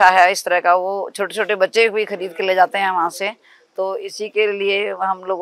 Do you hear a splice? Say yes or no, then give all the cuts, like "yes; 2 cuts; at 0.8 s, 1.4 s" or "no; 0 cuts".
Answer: no; 0 cuts